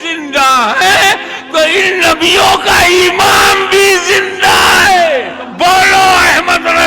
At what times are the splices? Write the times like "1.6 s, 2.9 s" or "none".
5.4 s